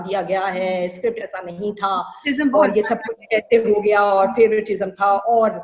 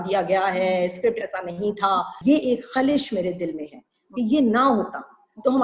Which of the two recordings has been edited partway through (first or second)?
second